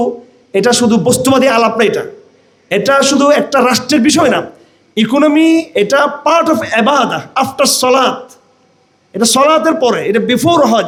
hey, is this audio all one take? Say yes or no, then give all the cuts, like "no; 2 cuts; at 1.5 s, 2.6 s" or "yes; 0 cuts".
yes; 0 cuts